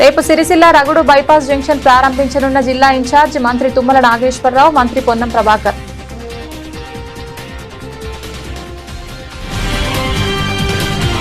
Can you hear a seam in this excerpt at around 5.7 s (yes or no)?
yes